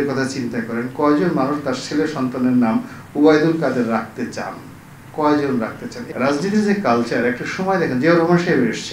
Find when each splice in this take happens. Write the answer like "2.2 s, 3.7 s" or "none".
5.9 s